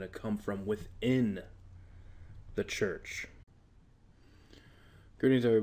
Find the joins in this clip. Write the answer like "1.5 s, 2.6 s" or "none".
none